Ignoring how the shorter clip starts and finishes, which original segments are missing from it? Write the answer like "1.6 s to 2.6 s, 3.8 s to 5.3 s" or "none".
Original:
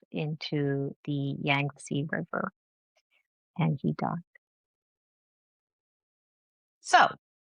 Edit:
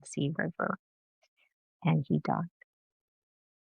none